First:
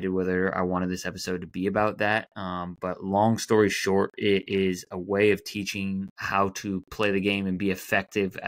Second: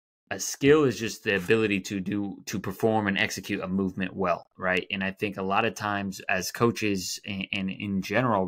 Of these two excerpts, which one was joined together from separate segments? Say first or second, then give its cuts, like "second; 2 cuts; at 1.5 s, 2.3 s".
first; 1 cut; at 6.2 s